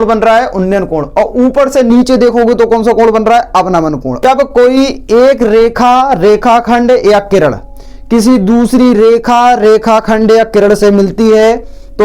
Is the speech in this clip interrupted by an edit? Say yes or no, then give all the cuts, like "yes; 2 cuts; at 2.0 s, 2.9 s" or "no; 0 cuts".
yes; 1 cut; at 4.2 s